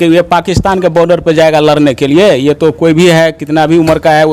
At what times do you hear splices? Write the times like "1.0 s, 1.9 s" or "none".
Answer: none